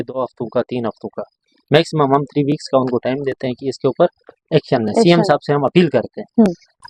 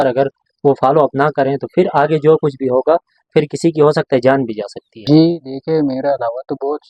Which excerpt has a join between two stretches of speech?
second; 1 cut; at 5.1 s

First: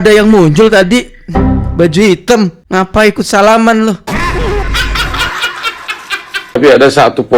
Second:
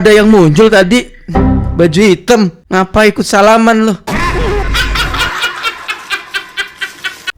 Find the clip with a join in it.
first; 1 cut; at 6.4 s

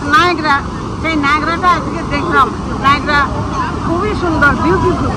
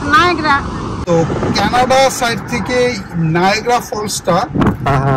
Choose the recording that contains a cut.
second; 1 cut; at 1.0 s

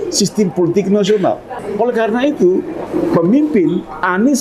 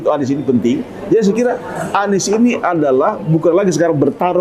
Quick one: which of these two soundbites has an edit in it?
first; 2 cuts; at 1.6 s, 2.8 s

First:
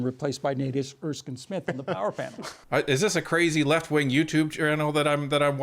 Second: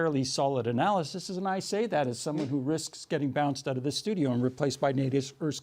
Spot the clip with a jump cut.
first; 1 cut; at 2.4 s

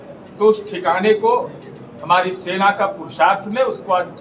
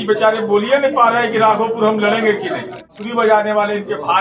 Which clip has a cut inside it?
second; 1 cut; at 3.0 s

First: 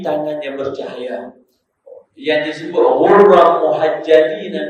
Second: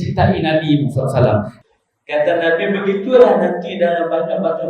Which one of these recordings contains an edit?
second; 1 cut; at 1.5 s

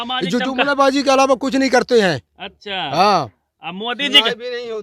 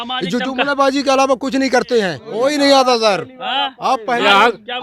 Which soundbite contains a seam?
second; 1 cut; at 2.2 s

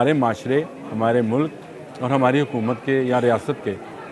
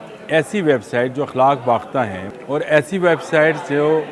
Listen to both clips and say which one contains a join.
second; 1 cut; at 2.2 s

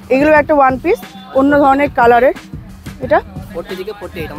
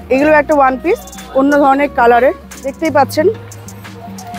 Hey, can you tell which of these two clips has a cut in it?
second; 1 cut; at 2.8 s

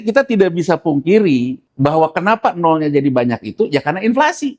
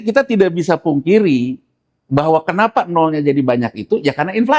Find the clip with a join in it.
first; 1 cut; at 1.6 s

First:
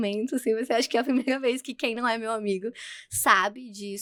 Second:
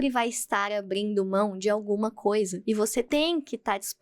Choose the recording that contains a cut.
second; 1 cut; at 2.9 s

